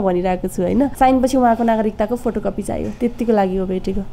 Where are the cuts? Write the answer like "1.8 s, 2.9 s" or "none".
0.9 s